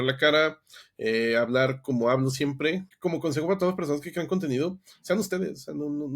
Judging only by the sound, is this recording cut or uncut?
cut